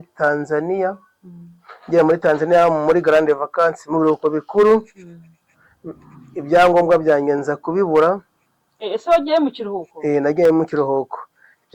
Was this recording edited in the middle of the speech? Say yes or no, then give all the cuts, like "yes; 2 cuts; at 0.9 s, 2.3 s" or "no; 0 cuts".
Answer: no; 0 cuts